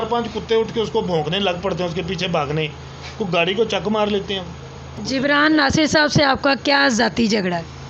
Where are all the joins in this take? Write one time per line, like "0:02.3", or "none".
0:04.9